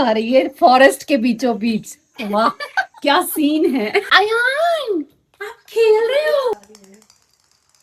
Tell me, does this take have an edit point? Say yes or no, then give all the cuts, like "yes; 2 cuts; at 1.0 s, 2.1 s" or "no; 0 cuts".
no; 0 cuts